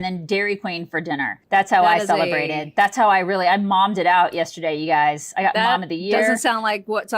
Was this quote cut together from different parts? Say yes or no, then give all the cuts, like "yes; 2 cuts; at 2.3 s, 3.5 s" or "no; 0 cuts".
yes; 1 cut; at 1.4 s